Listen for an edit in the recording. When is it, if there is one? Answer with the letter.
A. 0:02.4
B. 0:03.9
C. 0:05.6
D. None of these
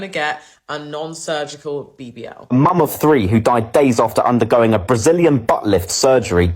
A